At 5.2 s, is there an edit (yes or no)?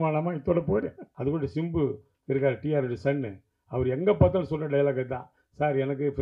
no